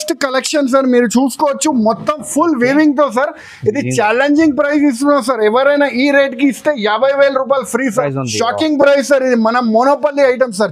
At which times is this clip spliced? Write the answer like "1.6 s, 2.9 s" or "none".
none